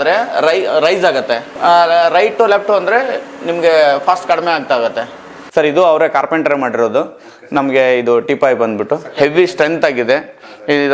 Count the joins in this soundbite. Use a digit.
2